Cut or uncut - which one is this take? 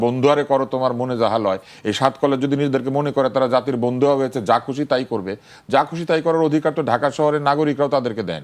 uncut